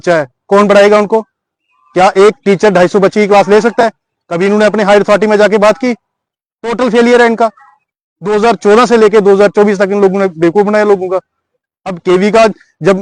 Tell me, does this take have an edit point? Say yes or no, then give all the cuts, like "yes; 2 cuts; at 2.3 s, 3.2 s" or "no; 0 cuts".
no; 0 cuts